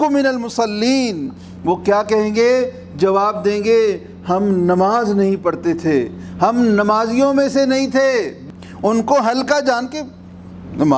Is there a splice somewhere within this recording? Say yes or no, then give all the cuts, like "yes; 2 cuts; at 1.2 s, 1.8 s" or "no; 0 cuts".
yes; 1 cut; at 8.4 s